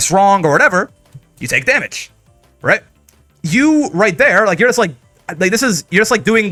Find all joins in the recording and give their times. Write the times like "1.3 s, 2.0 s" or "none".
none